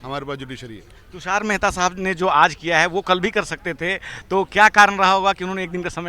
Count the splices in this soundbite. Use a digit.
0